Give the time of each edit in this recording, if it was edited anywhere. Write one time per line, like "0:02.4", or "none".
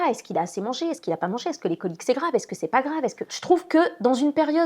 0:03.3